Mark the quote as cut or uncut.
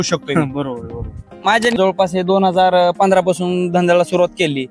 cut